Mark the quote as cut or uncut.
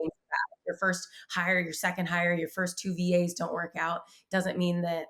uncut